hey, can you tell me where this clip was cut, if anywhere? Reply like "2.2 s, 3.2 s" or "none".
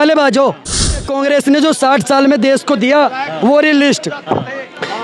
1.1 s